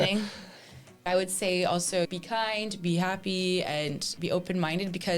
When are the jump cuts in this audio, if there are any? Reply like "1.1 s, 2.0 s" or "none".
1.1 s, 2.1 s, 4.1 s